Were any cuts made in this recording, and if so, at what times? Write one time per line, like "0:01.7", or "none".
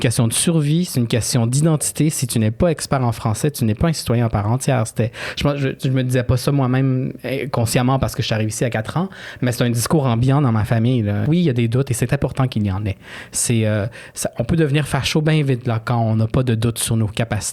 0:11.2